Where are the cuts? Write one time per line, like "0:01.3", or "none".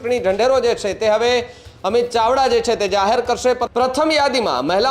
0:03.6